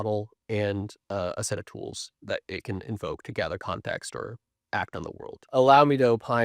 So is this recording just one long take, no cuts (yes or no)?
no